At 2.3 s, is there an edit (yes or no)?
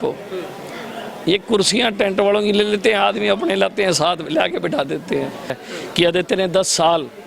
no